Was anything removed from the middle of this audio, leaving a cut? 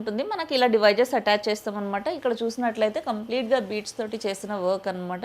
no; 0 cuts

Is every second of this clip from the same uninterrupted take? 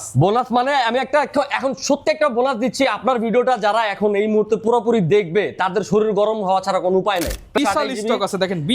no; 1 cut; at 7.6 s

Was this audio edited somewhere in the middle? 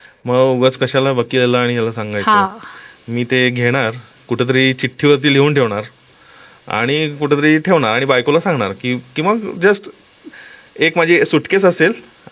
no; 0 cuts

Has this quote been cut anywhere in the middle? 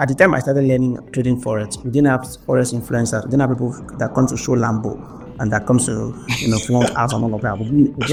no; 0 cuts

